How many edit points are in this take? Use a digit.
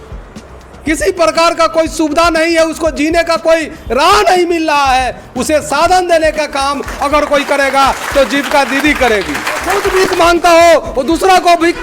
1